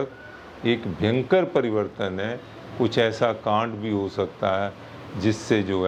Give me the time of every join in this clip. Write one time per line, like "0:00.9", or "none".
none

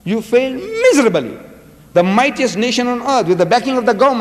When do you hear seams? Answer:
0:03.0

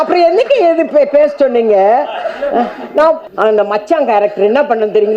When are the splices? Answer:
0:03.3

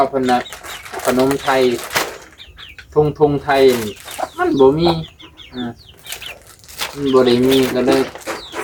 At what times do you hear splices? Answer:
none

